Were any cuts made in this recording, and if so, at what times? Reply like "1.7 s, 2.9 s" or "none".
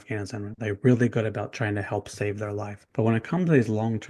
2.8 s